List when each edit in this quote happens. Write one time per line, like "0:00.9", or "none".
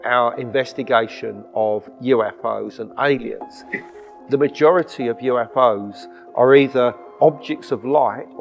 0:03.9